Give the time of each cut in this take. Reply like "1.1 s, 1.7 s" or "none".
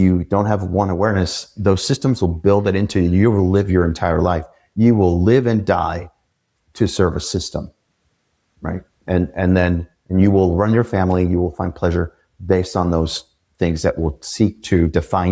none